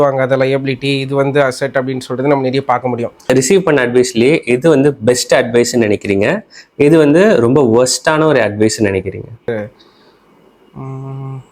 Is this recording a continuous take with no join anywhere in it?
no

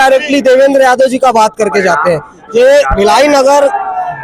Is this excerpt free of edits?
yes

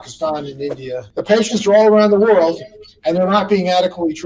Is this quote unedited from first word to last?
no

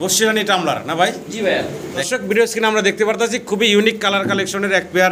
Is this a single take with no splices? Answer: no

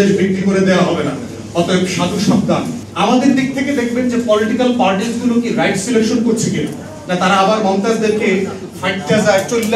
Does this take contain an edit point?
yes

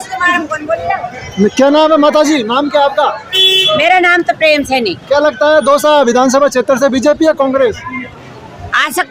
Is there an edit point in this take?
no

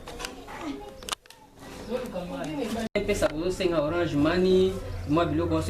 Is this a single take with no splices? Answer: no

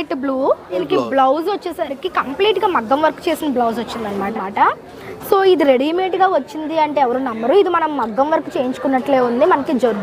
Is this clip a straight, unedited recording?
no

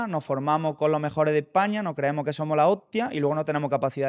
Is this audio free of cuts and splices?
yes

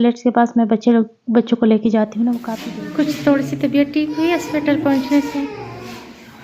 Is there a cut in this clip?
yes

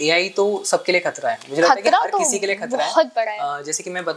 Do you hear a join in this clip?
no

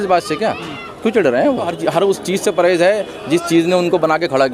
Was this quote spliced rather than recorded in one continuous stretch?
yes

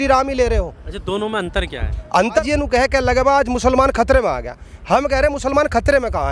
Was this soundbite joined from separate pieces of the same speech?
yes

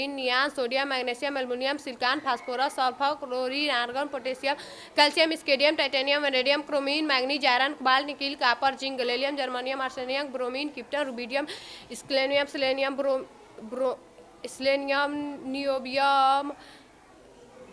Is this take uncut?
yes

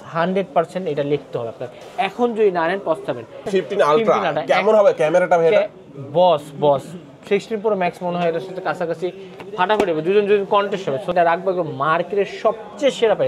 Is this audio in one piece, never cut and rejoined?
no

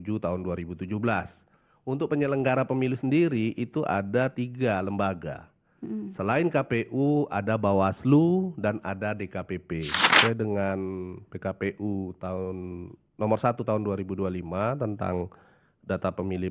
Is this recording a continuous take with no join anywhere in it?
no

